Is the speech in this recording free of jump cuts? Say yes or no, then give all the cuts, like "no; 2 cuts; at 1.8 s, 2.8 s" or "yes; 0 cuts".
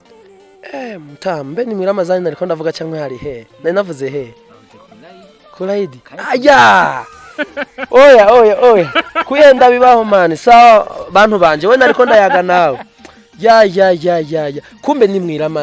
yes; 0 cuts